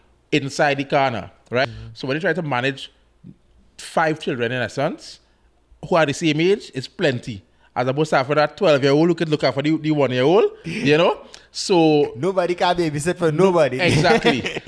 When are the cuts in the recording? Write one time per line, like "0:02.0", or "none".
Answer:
0:01.6